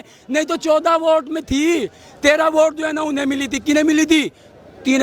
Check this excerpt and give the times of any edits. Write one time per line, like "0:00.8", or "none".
none